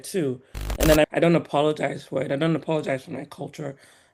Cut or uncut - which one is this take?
cut